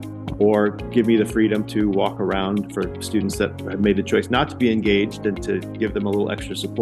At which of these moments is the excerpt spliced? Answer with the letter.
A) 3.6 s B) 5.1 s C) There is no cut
A